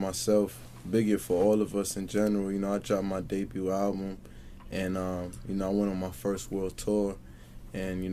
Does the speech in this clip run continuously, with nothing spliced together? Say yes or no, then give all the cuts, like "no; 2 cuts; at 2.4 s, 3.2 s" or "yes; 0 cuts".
yes; 0 cuts